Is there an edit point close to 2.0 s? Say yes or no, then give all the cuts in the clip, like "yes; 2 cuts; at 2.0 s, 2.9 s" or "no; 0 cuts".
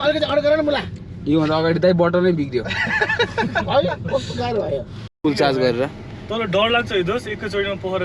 no; 1 cut; at 5.0 s